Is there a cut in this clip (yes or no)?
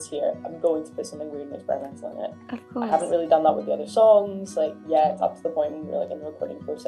no